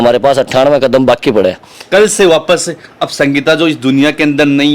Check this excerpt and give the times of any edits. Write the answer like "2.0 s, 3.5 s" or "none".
1.7 s

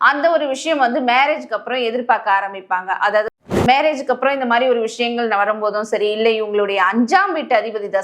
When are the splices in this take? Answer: 3.3 s

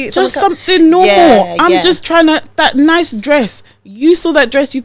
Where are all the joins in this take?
none

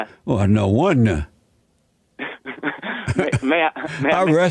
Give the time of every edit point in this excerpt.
none

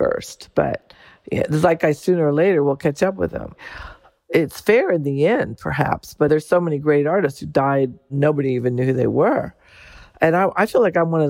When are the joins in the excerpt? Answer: 4.3 s, 6.3 s, 8.1 s

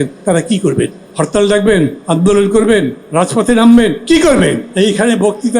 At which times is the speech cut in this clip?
1.0 s, 2.0 s, 3.0 s, 4.6 s

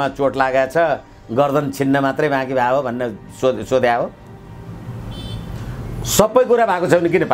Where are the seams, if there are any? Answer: none

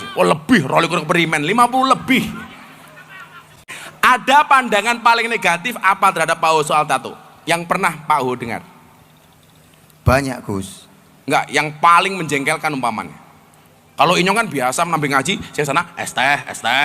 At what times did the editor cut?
3.6 s

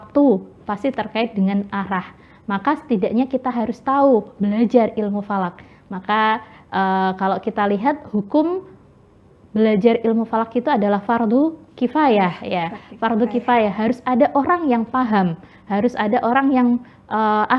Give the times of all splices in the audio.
none

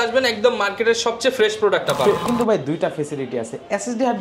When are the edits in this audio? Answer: 2.2 s

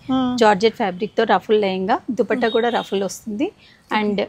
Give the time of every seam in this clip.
none

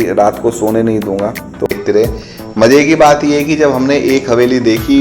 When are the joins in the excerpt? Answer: 1.7 s

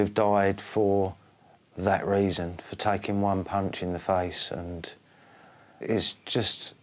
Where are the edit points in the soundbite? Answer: 5.8 s

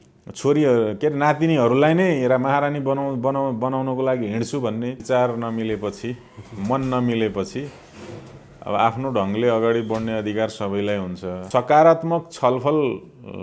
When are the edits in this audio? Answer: 5.0 s, 11.4 s

